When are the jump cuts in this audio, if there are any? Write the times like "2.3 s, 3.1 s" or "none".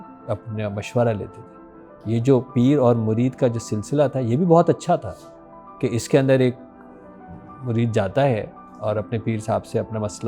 none